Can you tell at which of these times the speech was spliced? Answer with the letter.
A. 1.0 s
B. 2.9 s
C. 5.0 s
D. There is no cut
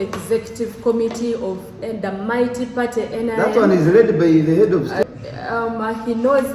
C